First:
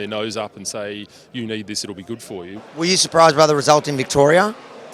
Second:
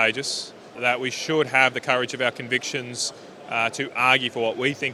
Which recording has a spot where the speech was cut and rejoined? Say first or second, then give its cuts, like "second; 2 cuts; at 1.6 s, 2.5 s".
first; 1 cut; at 2.5 s